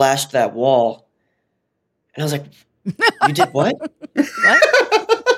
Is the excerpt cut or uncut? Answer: uncut